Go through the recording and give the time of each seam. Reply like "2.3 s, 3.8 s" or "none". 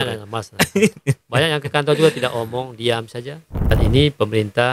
3.7 s